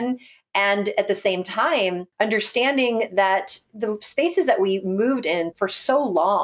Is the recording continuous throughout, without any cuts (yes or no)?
no